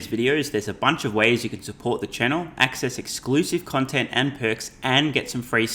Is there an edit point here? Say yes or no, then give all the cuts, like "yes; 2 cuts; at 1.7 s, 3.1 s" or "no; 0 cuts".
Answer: no; 0 cuts